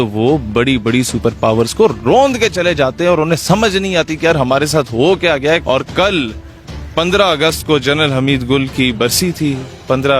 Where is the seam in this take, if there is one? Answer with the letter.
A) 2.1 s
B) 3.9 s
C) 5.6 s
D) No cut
C